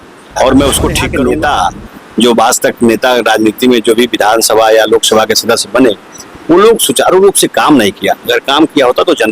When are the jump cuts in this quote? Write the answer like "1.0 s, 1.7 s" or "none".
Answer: 1.0 s